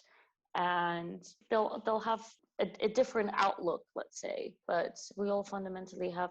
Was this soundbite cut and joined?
yes; 3 cuts; at 1.3 s, 2.4 s, 4.5 s

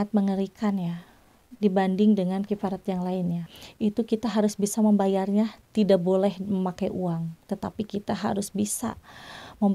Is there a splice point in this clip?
yes; 1 cut; at 3.5 s

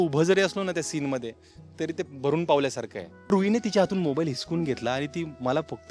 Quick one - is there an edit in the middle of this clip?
yes; 1 cut; at 3.3 s

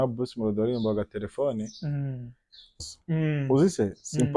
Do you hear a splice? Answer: yes; 1 cut; at 2.8 s

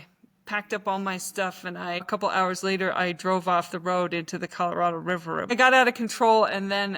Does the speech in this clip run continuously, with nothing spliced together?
no; 2 cuts; at 2.1 s, 5.5 s

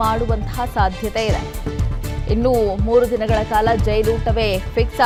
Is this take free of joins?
yes; 0 cuts

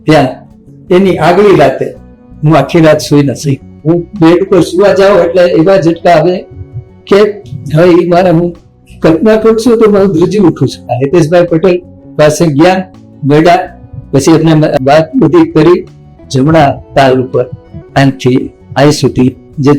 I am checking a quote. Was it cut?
yes; 2 cuts; at 10.8 s, 16.0 s

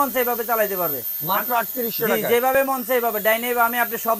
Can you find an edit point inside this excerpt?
no; 0 cuts

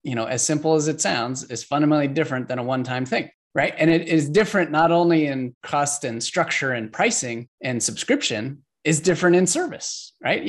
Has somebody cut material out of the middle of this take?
no; 0 cuts

